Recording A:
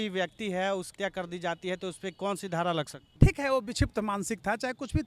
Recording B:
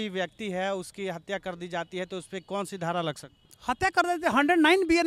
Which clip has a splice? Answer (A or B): A